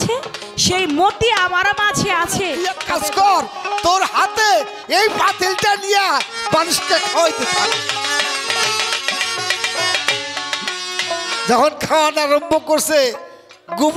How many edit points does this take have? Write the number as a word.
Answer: one